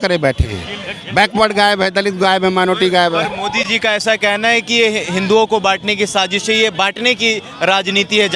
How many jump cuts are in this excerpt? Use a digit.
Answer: 0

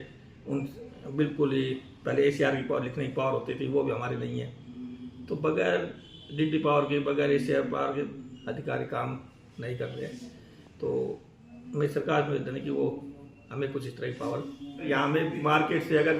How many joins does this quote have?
1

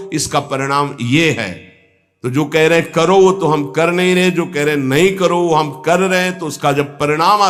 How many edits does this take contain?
0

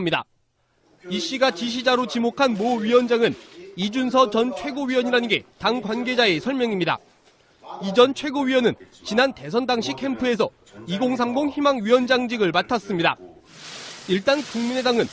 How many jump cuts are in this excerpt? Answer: 0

